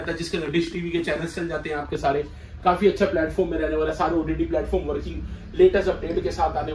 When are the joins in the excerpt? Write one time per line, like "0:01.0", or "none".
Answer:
none